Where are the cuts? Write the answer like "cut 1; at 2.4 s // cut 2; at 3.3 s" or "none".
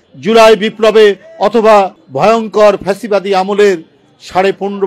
cut 1; at 2.0 s